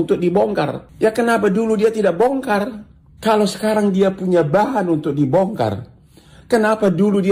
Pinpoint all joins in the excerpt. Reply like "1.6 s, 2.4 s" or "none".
none